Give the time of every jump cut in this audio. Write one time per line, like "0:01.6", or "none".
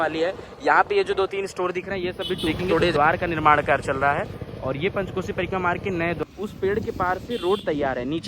0:02.9
0:06.2